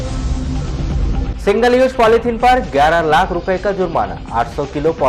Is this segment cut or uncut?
cut